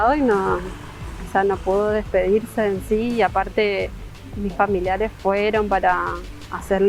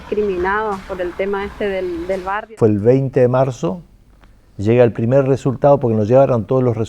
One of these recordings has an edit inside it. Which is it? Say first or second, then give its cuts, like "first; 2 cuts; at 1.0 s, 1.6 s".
second; 1 cut; at 2.5 s